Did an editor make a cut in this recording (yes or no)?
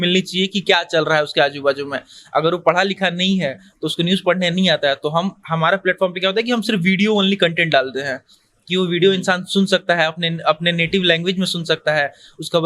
no